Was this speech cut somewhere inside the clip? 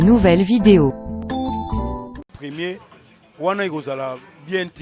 yes; 1 cut; at 2.3 s

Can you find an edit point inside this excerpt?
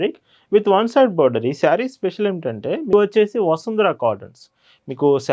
yes; 1 cut; at 2.9 s

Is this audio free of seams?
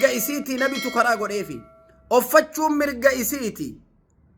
yes; 0 cuts

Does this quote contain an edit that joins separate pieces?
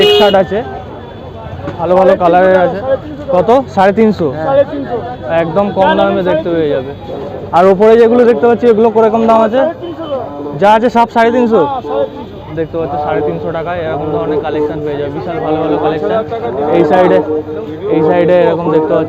no; 0 cuts

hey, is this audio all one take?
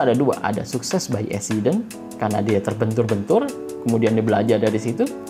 yes; 0 cuts

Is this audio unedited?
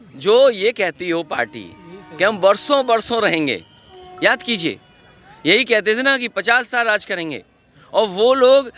yes; 0 cuts

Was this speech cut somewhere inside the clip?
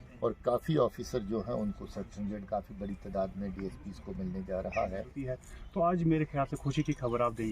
yes; 1 cut; at 5.1 s

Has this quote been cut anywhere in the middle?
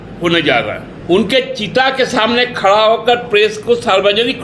yes; 1 cut; at 0.9 s

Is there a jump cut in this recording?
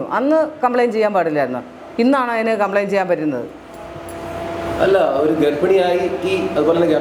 no; 0 cuts

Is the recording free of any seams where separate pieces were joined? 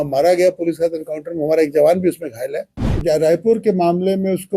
no; 1 cut; at 3.0 s

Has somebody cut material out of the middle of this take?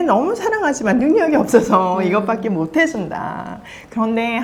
no; 0 cuts

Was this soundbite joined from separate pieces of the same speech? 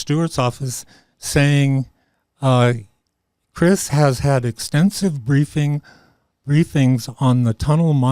no; 0 cuts

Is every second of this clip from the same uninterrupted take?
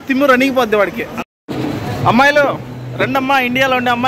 no; 1 cut; at 1.1 s

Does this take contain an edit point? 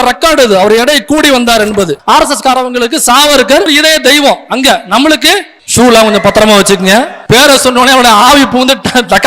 yes; 4 cuts; at 2.0 s, 3.7 s, 5.6 s, 7.2 s

